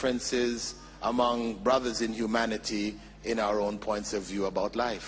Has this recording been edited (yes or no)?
no